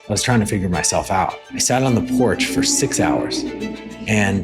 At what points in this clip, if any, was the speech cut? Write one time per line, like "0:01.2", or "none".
0:01.5